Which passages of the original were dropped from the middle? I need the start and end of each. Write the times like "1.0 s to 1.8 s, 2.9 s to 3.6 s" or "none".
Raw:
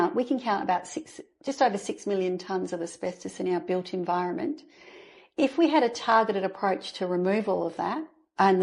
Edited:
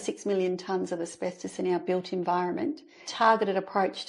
4.9 s to 6.0 s